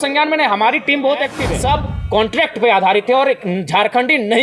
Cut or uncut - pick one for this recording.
cut